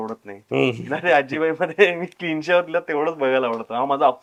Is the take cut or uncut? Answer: uncut